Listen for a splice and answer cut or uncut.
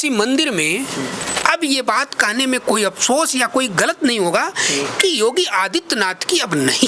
cut